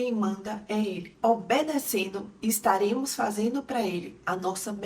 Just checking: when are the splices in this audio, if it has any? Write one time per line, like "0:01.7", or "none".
0:01.1